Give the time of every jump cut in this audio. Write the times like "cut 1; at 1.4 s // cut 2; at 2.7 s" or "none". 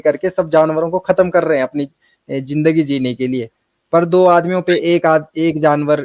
none